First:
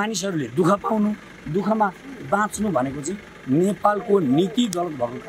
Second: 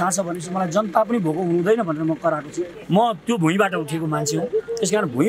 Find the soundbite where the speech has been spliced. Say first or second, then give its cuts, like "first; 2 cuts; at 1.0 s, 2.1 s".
second; 1 cut; at 2.7 s